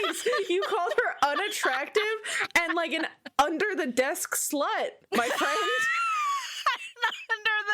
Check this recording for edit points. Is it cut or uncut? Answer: cut